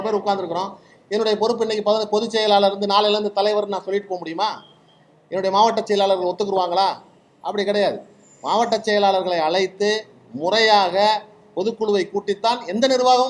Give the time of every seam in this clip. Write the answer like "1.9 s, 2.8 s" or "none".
none